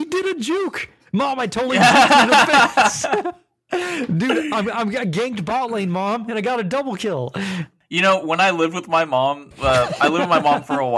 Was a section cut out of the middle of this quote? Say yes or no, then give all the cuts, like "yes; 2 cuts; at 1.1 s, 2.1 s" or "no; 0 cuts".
no; 0 cuts